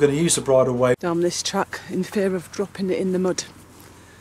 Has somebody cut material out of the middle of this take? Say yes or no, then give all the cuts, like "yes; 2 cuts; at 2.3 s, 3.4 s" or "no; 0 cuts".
yes; 1 cut; at 1.0 s